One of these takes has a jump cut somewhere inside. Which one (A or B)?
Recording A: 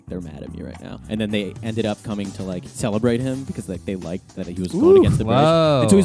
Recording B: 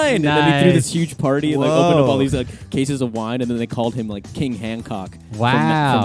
A